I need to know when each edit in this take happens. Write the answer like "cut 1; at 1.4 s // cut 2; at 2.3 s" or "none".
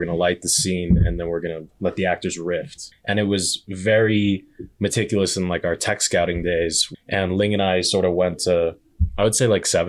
cut 1; at 2.8 s // cut 2; at 6.8 s